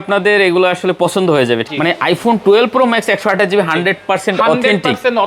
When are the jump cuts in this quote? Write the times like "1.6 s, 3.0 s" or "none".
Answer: 1.7 s